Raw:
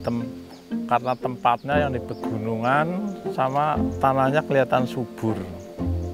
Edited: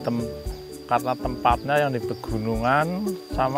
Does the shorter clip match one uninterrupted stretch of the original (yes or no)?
yes